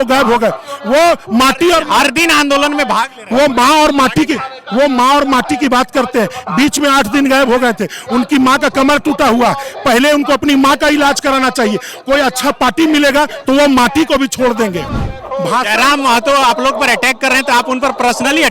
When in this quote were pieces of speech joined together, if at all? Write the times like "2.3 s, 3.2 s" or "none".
15.1 s